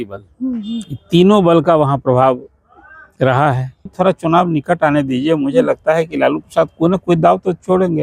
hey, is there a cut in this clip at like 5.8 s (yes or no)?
no